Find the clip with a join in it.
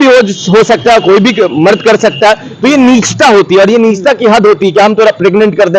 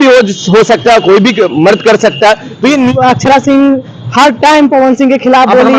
second; 1 cut; at 2.9 s

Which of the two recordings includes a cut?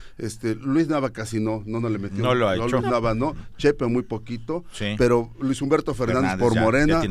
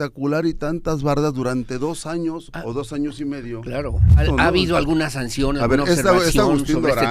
second; 1 cut; at 4.2 s

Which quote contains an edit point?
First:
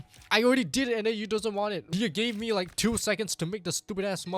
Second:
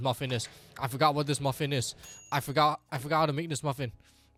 first; 1 cut; at 1.8 s

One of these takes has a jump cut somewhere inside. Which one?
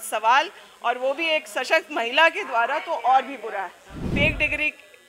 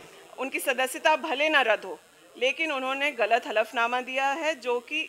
first; 1 cut; at 4.0 s

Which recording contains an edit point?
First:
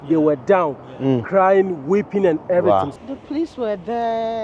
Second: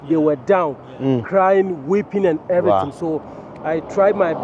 first; 1 cut; at 2.9 s

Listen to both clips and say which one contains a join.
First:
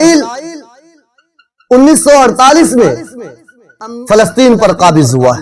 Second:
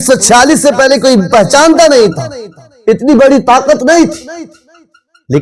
first; 1 cut; at 3.9 s

